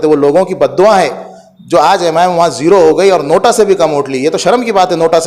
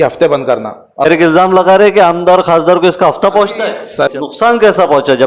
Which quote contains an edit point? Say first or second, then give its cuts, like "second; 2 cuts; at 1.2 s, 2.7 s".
second; 2 cuts; at 1.1 s, 4.1 s